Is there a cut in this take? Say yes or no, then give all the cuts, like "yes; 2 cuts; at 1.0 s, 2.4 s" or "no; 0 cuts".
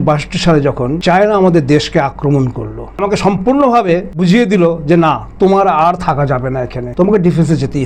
yes; 4 cuts; at 1.0 s, 3.0 s, 4.2 s, 6.8 s